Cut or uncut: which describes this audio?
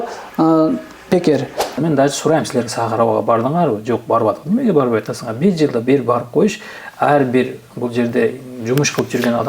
cut